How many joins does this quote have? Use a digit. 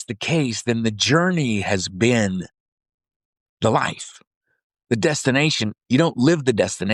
0